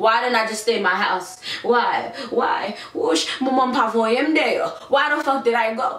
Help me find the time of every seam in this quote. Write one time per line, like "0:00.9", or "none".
none